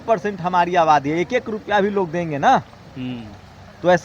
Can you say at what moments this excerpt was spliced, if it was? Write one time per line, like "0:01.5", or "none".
none